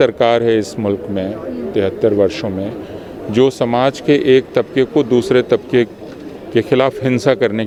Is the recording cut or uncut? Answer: uncut